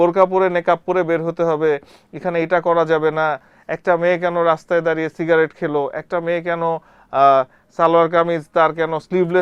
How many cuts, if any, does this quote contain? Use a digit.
0